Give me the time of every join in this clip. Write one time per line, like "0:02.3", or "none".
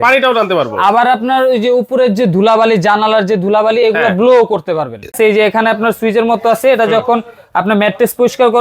0:05.2